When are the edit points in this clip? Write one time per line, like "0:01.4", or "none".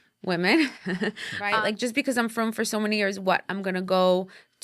0:01.5